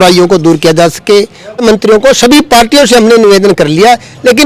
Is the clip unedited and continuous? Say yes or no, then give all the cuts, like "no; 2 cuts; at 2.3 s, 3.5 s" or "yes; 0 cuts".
no; 1 cut; at 1.6 s